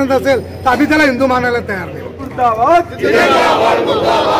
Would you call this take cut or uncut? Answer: cut